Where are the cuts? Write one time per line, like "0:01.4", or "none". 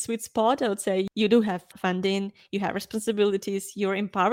0:01.1